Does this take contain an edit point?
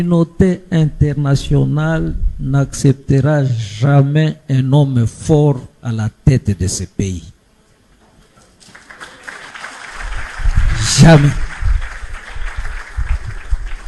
no; 0 cuts

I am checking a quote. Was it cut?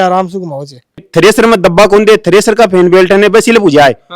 yes; 1 cut; at 1.1 s

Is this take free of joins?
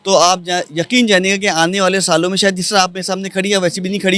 yes; 0 cuts

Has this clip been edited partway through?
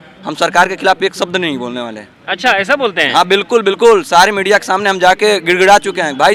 no; 0 cuts

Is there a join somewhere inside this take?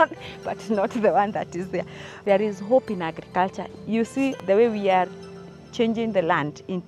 yes; 2 cuts; at 2.1 s, 4.0 s

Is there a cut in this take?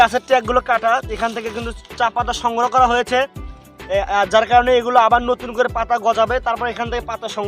no; 0 cuts

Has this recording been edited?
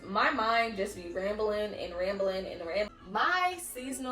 yes; 1 cut; at 2.9 s

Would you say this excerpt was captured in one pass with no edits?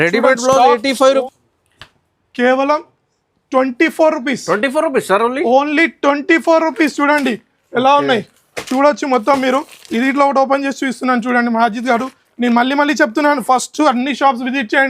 no; 1 cut; at 1.2 s

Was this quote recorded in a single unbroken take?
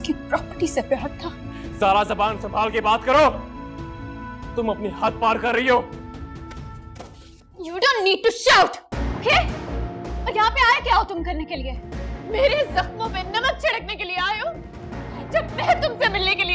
yes; 0 cuts

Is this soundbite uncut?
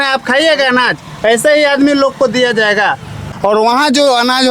no; 1 cut; at 3.3 s

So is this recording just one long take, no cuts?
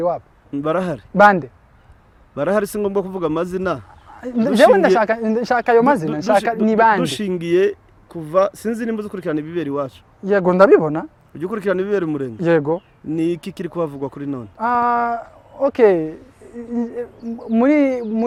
yes; 0 cuts

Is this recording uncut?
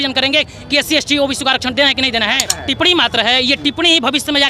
no; 1 cut; at 2.5 s

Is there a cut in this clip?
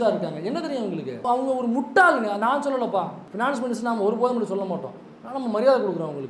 yes; 2 cuts; at 1.2 s, 3.2 s

